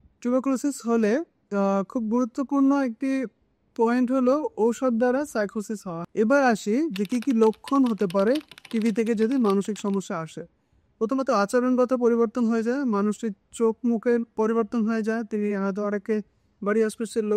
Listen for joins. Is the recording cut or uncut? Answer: cut